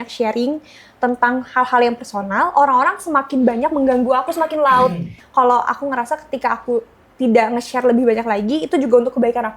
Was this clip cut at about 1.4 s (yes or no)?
no